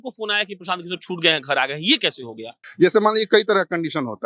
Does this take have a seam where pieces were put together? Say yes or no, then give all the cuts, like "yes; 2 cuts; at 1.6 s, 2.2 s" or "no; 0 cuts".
yes; 1 cut; at 2.6 s